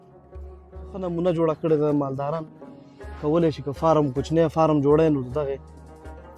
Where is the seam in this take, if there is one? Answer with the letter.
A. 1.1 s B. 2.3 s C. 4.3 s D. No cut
A